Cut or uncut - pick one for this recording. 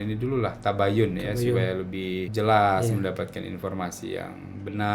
cut